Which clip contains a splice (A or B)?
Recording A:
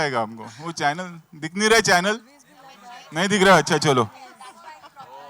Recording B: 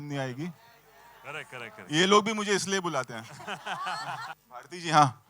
B